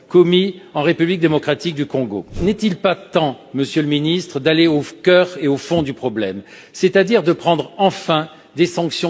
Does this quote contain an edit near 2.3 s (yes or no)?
yes